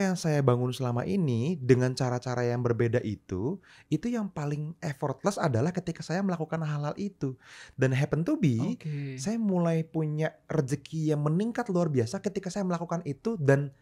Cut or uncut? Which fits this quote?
uncut